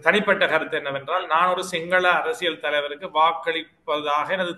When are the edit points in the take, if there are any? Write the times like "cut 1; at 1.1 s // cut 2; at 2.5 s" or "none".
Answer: none